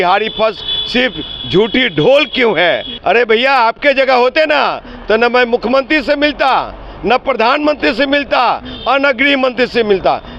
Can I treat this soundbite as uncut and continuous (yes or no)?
no